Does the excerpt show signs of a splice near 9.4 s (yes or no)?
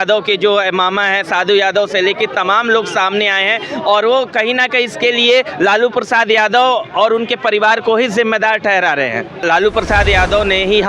yes